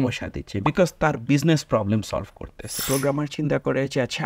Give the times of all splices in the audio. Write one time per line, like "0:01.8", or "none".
0:02.8